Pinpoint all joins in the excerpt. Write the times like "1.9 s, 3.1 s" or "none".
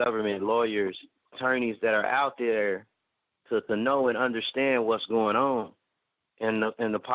1.4 s